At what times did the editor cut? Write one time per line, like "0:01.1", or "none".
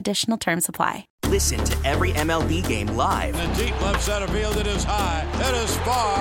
0:01.1

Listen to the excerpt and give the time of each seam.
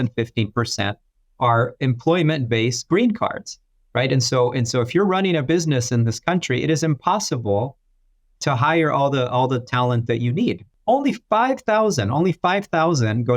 0:10.7

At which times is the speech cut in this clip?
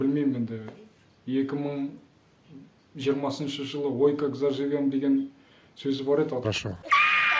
0:06.5

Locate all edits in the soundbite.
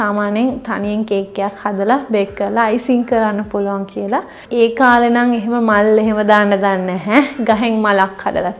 0:04.4

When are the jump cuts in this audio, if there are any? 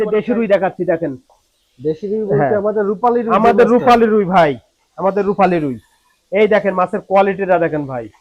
none

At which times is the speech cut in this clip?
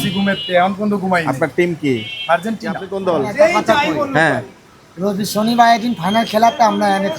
0:02.9

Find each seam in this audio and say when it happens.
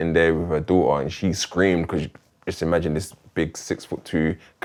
none

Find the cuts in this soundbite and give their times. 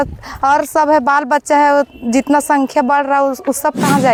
none

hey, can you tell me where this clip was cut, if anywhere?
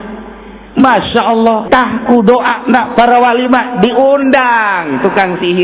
0:01.6

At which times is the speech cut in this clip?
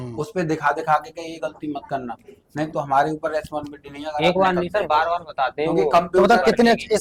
none

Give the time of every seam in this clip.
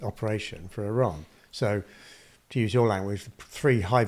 none

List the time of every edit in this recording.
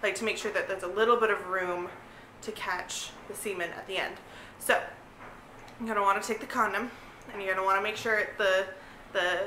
none

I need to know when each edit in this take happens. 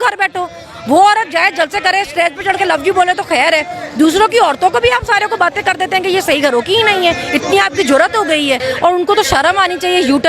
0:08.6

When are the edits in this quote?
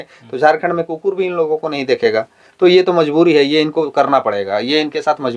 none

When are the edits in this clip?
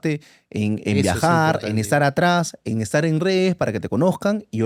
none

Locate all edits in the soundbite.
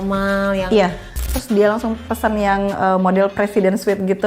0:01.3

